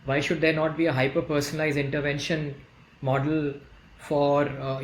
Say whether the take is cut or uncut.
uncut